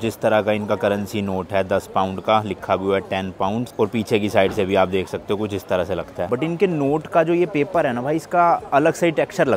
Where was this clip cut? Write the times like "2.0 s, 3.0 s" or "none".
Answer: none